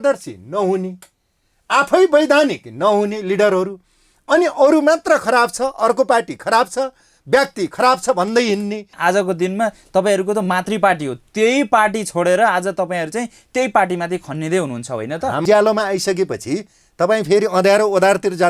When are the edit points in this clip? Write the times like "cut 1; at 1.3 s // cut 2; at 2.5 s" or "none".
cut 1; at 8.9 s // cut 2; at 15.4 s